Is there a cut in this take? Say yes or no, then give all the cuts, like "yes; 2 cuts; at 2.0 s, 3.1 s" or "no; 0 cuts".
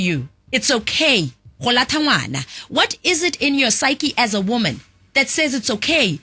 no; 0 cuts